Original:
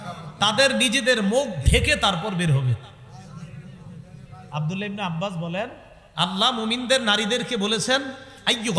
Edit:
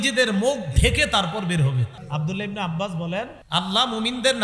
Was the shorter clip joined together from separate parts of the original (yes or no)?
yes